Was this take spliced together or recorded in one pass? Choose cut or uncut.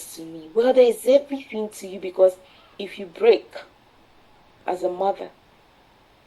cut